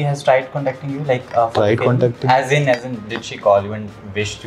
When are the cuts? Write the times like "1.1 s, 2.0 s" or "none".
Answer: none

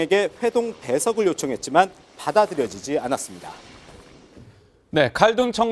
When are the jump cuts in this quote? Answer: 2.3 s

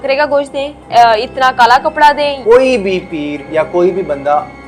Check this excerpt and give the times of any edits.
2.4 s

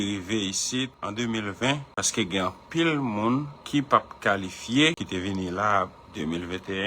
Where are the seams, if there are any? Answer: 1.0 s, 2.0 s, 3.6 s, 5.0 s

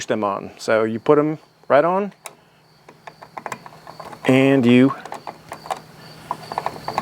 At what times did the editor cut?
none

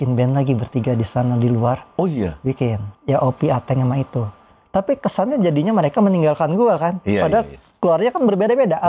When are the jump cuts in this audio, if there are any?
2.9 s

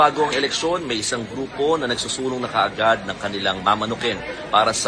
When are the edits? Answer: 1.7 s

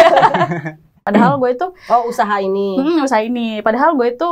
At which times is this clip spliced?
1.0 s

